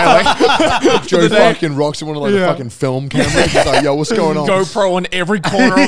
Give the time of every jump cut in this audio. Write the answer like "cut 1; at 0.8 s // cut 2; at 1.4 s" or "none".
cut 1; at 1.0 s // cut 2; at 4.5 s